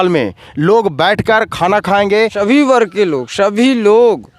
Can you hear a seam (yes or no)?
yes